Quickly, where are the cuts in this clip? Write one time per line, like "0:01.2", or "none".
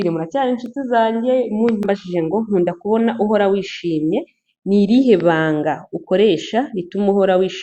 0:01.8